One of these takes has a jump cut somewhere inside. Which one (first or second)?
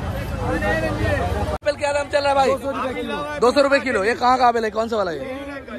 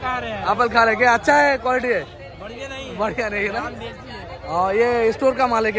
first